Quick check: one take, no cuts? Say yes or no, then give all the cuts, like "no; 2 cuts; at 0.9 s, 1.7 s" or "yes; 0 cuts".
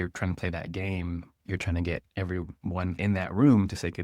no; 1 cut; at 1.3 s